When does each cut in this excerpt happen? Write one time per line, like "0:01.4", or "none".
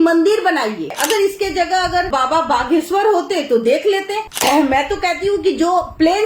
0:01.0
0:04.2